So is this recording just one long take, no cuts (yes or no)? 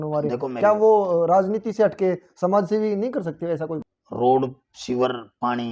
no